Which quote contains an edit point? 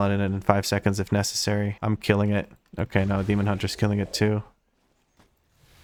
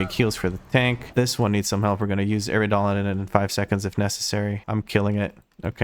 second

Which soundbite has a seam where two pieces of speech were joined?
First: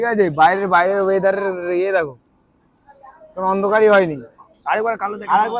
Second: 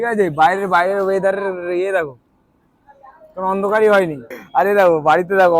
second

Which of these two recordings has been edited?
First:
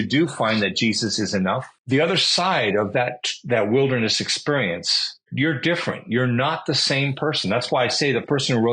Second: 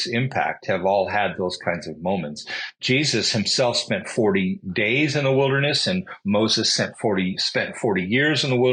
first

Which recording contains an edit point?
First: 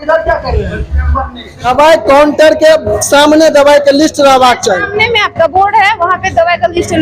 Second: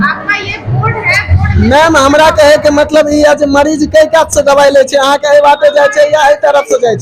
first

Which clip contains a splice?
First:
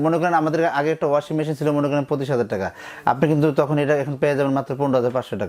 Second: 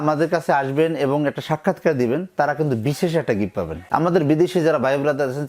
second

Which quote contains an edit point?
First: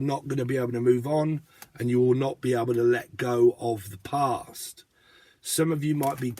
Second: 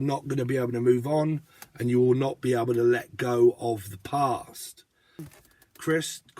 second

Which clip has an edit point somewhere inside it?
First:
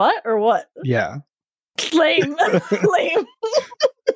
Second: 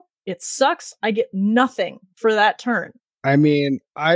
second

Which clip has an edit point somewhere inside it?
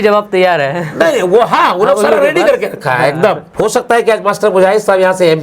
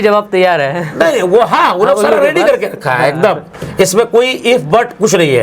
first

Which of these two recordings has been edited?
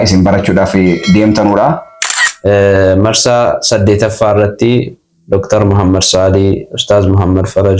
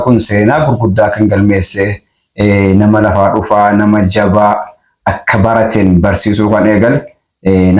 first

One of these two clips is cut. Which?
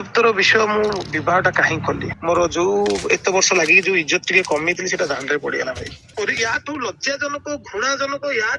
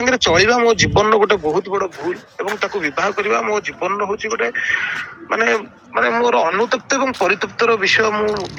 first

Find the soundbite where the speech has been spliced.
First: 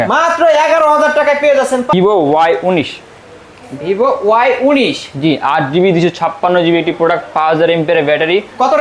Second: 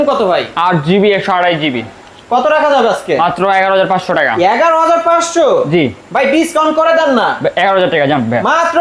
first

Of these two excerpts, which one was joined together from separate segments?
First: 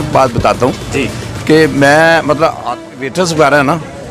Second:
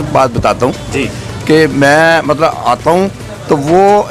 first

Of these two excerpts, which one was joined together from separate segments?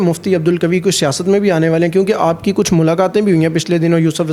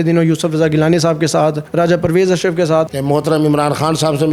second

